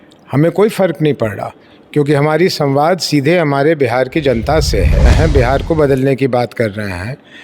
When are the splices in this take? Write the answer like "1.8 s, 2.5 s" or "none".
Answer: 5.1 s